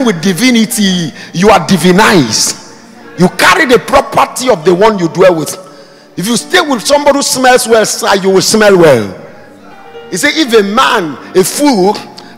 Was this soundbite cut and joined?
no; 0 cuts

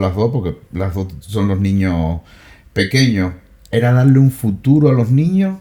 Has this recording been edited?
no; 0 cuts

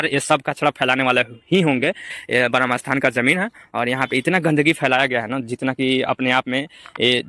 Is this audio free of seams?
no; 1 cut; at 2.1 s

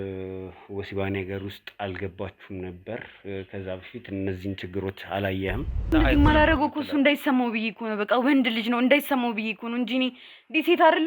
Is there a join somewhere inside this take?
yes; 1 cut; at 5.9 s

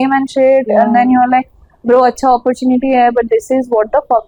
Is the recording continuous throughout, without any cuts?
yes; 0 cuts

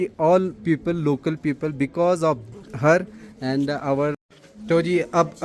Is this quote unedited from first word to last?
no; 1 cut; at 4.2 s

